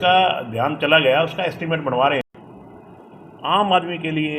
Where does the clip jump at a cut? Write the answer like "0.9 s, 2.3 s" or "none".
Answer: 2.3 s